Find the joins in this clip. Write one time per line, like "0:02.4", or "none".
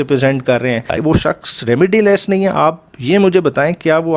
0:01.0